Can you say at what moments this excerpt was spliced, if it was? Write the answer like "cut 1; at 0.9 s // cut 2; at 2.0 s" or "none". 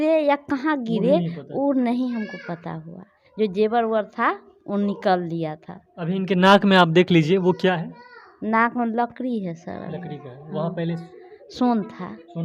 cut 1; at 3.2 s